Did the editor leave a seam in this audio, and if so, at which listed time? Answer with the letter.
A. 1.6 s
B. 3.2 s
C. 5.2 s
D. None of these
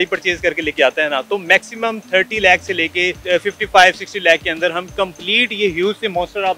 B